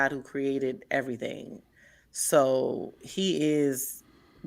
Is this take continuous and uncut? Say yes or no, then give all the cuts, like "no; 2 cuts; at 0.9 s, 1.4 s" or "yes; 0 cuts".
yes; 0 cuts